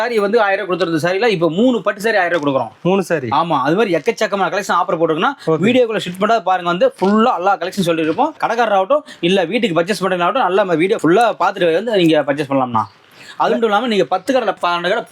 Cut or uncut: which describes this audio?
uncut